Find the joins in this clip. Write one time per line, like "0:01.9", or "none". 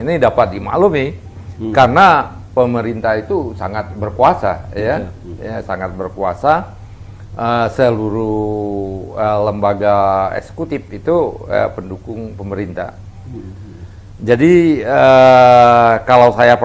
none